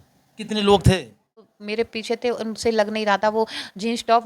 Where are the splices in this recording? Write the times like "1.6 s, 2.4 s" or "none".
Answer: 1.6 s